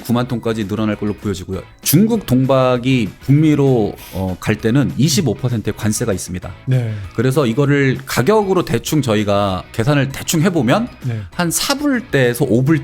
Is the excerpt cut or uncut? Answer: cut